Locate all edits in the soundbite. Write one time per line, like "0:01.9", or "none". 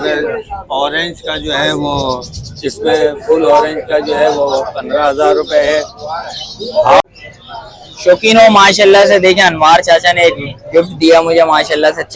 0:07.0